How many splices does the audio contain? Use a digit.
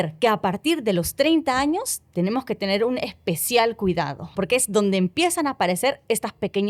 1